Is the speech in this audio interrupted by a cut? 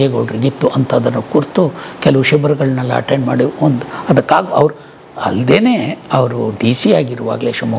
no; 0 cuts

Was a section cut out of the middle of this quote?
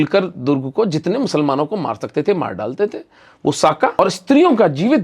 yes; 1 cut; at 3.9 s

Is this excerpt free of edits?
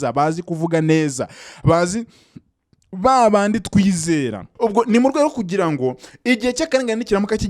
no; 1 cut; at 4.4 s

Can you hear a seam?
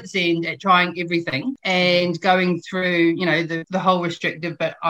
yes; 2 cuts; at 1.5 s, 3.6 s

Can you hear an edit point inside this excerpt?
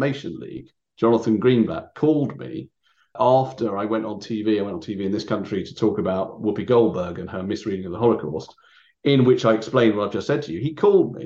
no; 0 cuts

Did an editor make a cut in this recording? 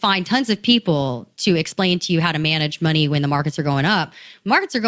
no; 0 cuts

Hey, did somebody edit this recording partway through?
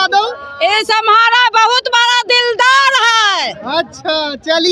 no; 0 cuts

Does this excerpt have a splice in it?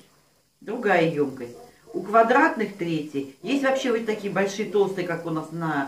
no; 0 cuts

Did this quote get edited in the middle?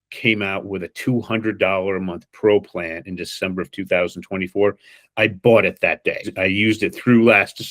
yes; 1 cut; at 6.3 s

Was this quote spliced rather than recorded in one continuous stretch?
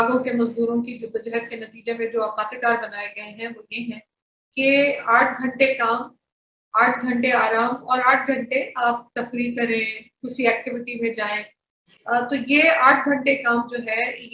no; 0 cuts

